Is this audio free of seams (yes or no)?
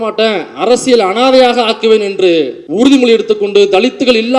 no